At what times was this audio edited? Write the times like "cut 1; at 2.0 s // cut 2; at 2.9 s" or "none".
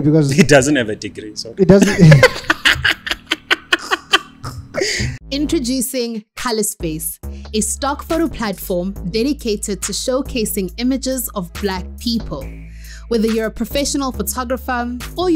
cut 1; at 5.1 s